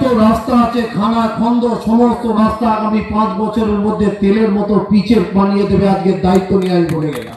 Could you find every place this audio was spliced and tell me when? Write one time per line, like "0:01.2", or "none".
none